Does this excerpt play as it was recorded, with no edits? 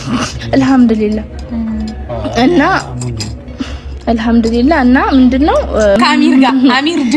no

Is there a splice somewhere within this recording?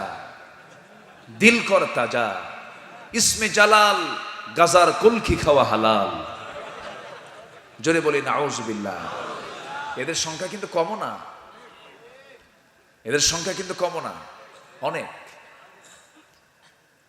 no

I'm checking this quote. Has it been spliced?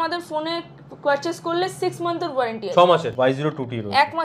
yes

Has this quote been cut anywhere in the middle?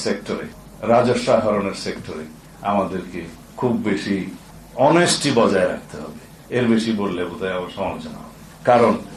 no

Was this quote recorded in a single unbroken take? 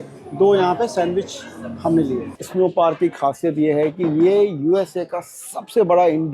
no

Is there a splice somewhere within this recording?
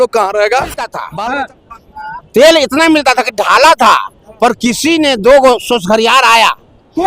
yes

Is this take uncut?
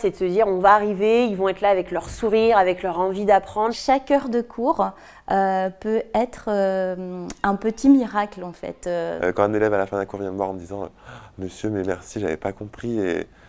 no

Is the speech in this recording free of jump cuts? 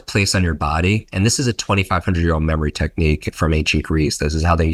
yes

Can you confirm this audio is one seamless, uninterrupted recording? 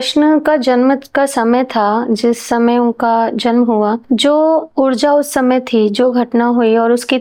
yes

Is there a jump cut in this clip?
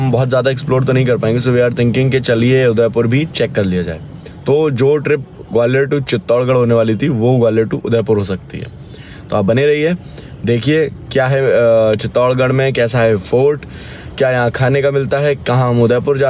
no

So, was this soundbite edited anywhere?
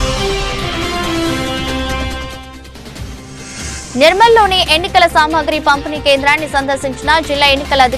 yes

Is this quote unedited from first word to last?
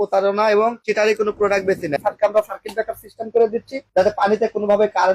no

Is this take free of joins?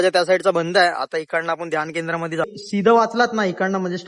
no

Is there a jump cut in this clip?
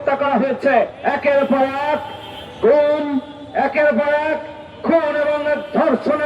yes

